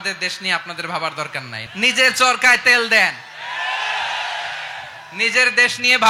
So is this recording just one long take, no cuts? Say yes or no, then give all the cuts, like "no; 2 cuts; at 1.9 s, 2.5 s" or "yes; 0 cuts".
no; 1 cut; at 1.6 s